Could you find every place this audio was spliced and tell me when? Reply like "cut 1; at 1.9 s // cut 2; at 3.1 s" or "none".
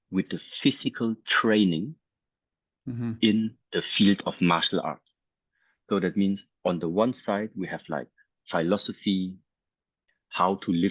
none